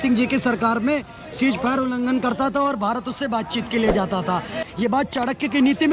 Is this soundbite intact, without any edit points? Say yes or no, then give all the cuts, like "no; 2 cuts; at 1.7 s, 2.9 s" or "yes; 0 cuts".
no; 1 cut; at 4.6 s